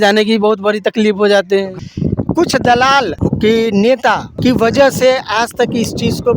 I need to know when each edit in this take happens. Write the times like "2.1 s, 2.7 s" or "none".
1.7 s, 3.1 s, 4.4 s